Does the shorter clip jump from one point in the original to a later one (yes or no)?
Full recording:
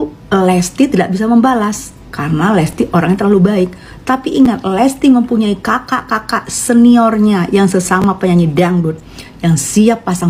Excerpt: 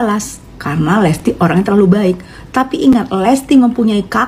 no